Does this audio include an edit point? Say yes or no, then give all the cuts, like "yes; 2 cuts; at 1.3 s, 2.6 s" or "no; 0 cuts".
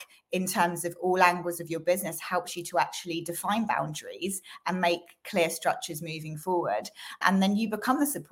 yes; 1 cut; at 7.2 s